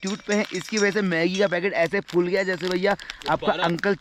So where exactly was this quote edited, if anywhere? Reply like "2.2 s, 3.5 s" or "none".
none